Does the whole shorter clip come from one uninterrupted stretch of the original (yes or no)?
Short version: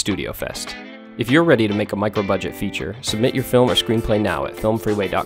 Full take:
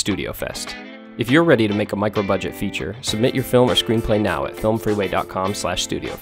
yes